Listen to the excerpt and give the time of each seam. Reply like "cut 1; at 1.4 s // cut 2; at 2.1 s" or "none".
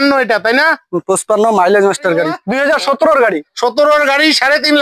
cut 1; at 2.4 s